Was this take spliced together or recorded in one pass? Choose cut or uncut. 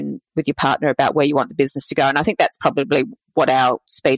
uncut